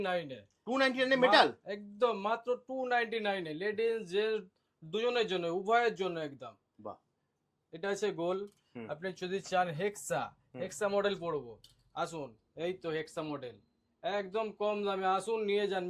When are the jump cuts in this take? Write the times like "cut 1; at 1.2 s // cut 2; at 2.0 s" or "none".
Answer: none